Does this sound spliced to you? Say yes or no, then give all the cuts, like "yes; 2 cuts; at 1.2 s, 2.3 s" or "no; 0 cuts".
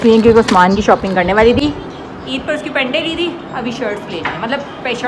no; 0 cuts